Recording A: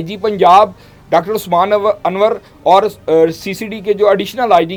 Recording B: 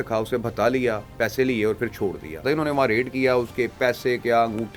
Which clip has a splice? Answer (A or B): B